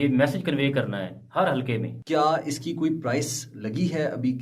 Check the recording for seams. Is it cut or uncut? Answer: cut